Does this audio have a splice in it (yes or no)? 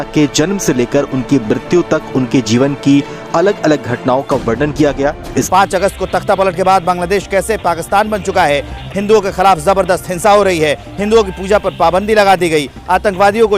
yes